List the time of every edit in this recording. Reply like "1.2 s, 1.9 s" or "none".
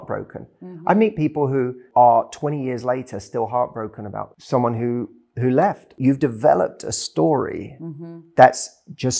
1.8 s, 4.3 s, 5.9 s